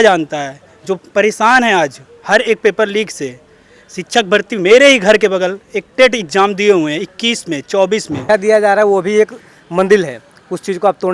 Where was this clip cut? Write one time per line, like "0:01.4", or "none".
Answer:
0:08.2